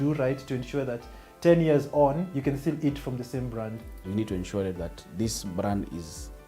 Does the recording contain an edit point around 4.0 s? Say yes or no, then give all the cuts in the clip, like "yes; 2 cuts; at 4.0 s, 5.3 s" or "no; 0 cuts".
yes; 1 cut; at 4.0 s